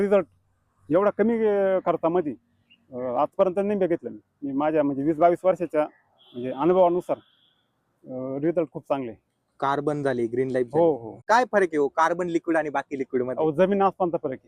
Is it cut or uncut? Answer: cut